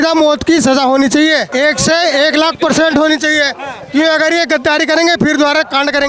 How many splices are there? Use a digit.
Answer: 1